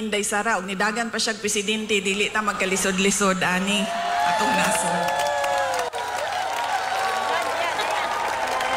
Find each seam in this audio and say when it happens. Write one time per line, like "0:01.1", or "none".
0:06.1